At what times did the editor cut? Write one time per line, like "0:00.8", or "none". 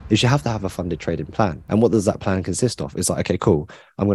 0:01.6